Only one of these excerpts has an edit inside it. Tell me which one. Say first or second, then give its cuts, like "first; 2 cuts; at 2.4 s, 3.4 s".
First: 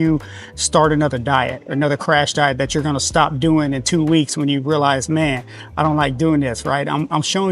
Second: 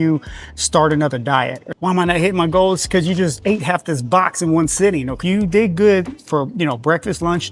second; 2 cuts; at 1.6 s, 5.1 s